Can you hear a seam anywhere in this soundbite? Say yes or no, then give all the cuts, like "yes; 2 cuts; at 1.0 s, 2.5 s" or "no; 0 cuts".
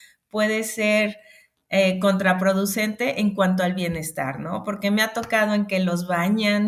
no; 0 cuts